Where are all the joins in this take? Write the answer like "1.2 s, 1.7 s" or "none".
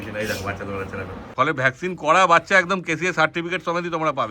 1.3 s